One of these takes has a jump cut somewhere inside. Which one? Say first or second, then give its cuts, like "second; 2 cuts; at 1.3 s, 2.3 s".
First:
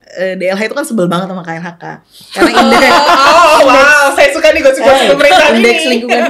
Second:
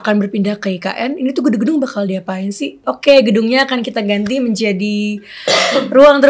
second; 1 cut; at 2.9 s